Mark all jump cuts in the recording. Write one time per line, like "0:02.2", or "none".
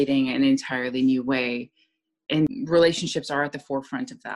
0:02.5